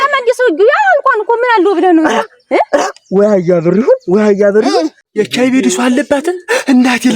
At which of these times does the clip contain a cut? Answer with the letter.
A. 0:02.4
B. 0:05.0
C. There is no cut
B